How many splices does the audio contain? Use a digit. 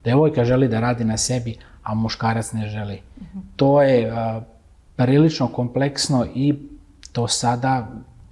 0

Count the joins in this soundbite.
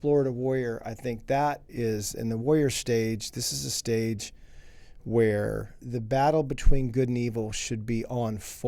2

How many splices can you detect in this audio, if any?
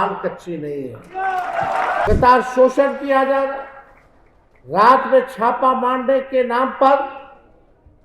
1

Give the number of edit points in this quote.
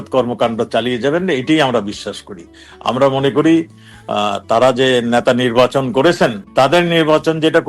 1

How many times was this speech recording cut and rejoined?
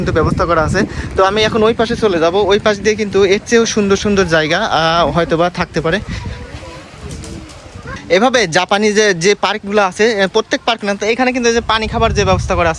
0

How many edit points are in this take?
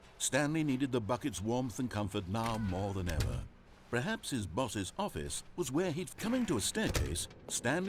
1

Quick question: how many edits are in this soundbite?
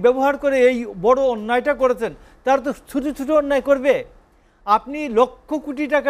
0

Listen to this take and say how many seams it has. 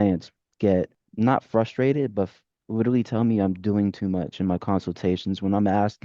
1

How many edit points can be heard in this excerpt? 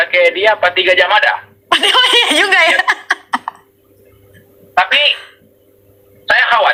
0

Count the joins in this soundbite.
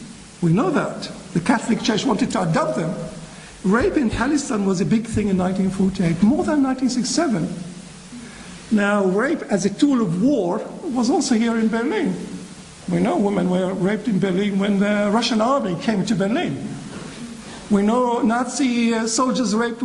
0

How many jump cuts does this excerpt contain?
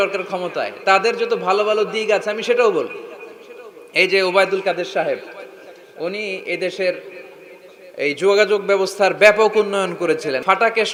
0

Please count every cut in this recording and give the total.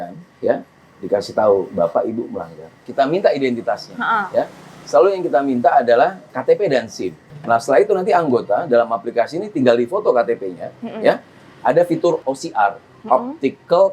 4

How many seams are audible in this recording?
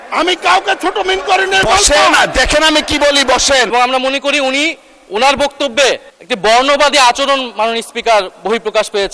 2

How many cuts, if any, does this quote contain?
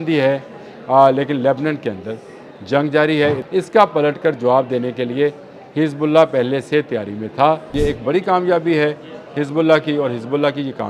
2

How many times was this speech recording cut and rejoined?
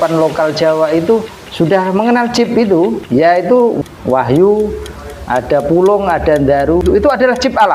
4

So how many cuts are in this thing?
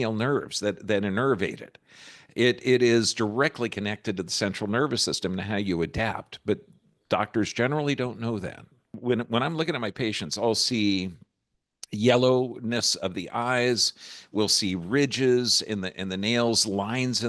1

